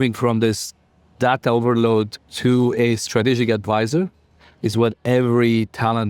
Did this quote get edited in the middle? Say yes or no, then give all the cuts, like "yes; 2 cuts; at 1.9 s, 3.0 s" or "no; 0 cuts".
yes; 1 cut; at 2.2 s